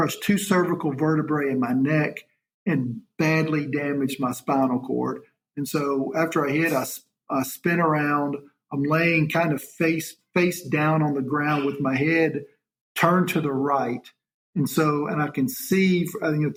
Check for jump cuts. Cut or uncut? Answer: uncut